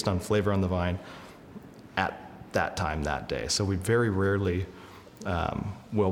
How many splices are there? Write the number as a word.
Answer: zero